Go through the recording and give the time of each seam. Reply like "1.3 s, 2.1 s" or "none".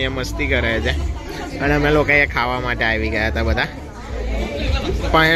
none